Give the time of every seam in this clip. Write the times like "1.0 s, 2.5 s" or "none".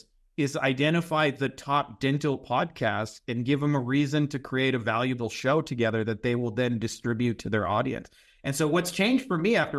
none